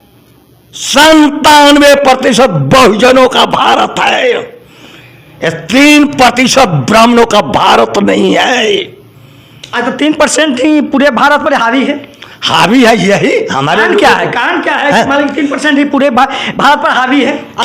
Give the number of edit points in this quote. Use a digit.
0